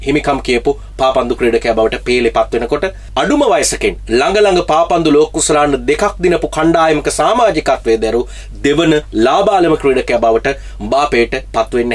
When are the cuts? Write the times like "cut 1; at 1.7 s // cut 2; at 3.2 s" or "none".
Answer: none